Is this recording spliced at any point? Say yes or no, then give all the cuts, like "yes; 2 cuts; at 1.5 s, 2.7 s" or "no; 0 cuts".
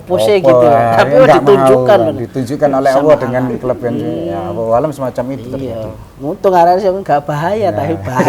no; 0 cuts